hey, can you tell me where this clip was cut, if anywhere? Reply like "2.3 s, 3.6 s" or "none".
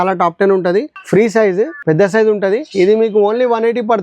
1.0 s, 1.8 s, 2.7 s